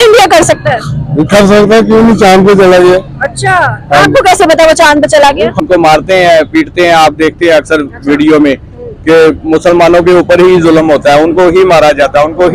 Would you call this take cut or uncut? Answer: cut